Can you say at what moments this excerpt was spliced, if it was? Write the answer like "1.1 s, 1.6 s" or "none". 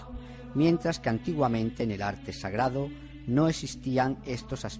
2.2 s